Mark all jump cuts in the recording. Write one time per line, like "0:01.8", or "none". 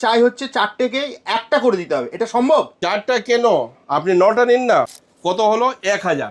0:02.8
0:05.0